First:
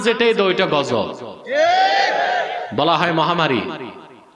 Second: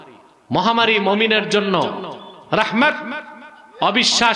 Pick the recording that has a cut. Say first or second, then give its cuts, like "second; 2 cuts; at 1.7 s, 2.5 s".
first; 1 cut; at 2.6 s